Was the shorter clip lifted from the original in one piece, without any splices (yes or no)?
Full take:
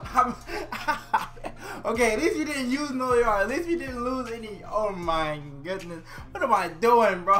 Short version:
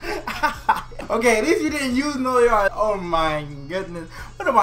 no